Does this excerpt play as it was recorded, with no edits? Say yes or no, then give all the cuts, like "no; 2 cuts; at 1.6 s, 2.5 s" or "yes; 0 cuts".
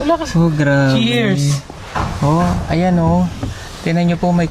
yes; 0 cuts